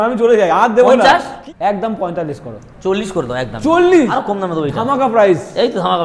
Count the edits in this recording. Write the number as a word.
two